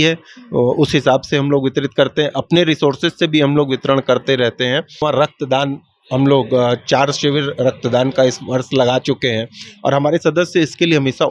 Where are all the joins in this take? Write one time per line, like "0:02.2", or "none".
0:05.0